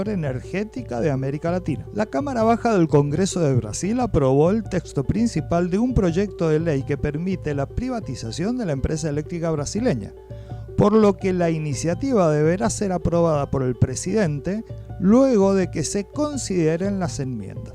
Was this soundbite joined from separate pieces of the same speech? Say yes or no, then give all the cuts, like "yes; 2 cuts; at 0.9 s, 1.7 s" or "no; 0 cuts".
no; 0 cuts